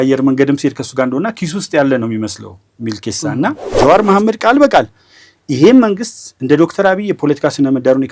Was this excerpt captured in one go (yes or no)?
no